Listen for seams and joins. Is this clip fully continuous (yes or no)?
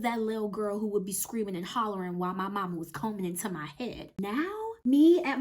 no